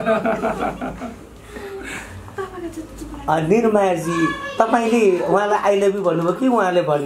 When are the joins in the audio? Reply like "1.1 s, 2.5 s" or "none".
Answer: none

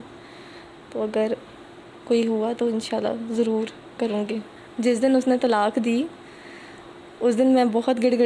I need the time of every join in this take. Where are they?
4.6 s

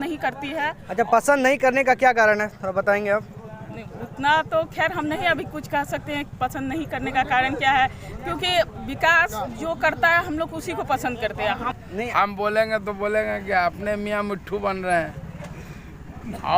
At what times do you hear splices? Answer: 11.7 s

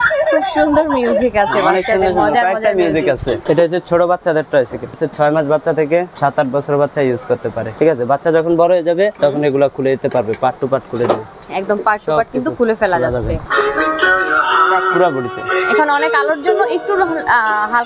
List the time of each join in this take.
3.4 s, 5.0 s, 6.1 s, 7.7 s, 9.1 s, 11.4 s, 13.4 s

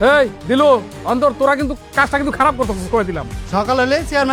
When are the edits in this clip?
none

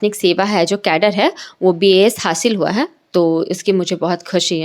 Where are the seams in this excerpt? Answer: none

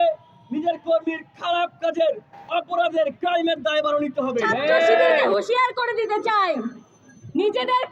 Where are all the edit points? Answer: 5.2 s

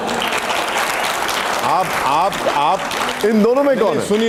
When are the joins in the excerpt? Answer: none

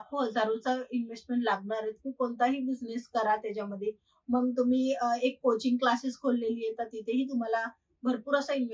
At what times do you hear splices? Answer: none

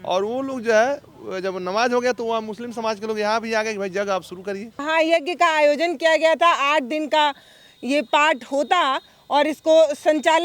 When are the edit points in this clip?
4.8 s

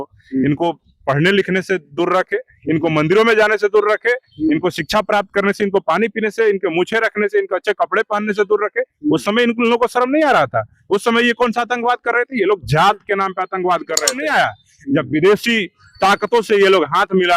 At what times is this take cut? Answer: 14.1 s

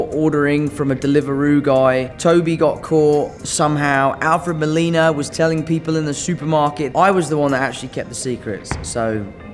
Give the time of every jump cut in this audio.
6.9 s

